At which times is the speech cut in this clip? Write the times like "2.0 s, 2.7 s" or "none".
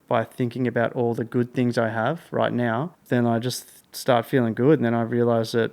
2.9 s